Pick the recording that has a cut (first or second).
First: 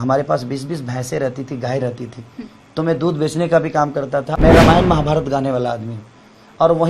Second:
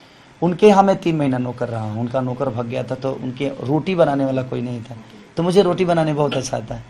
first